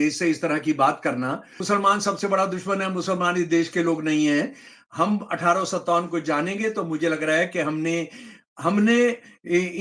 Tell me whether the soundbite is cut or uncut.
cut